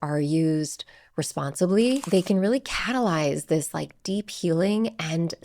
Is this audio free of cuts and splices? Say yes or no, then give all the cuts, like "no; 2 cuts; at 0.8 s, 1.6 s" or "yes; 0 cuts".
no; 1 cut; at 2.0 s